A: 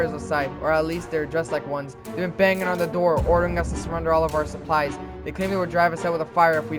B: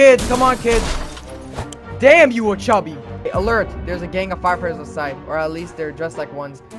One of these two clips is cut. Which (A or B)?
B